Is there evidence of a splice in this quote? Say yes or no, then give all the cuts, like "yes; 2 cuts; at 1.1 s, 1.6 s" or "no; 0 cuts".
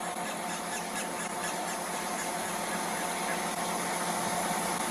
no; 0 cuts